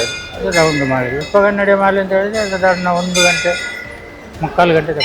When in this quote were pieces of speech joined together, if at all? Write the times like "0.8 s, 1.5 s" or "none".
1.2 s